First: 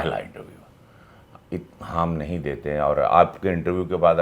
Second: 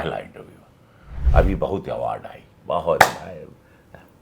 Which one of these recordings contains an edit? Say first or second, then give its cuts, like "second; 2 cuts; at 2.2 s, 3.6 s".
second; 1 cut; at 1.2 s